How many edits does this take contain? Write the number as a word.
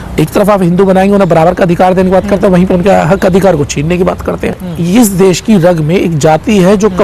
one